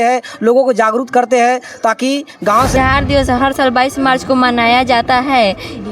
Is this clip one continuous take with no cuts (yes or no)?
no